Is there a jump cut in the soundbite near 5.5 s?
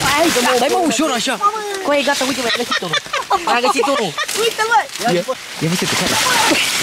yes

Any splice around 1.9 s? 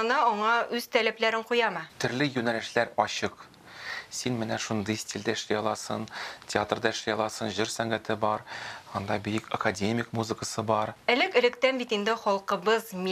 yes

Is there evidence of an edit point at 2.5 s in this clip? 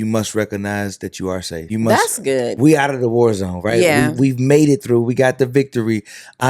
yes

